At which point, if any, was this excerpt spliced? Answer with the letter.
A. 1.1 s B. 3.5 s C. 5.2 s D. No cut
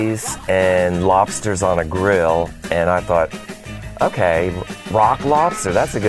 D